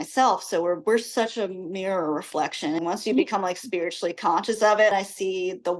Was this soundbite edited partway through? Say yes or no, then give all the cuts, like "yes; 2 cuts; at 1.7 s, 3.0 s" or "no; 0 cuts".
yes; 2 cuts; at 2.8 s, 4.9 s